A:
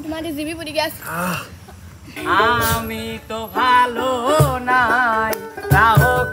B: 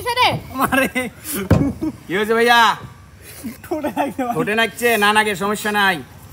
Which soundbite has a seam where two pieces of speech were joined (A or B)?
A